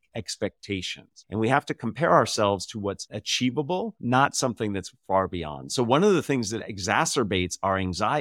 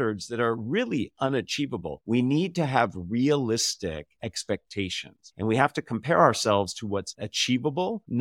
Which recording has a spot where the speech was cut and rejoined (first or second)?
second